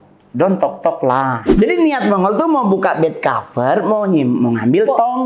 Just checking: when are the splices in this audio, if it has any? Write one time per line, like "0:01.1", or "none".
0:01.4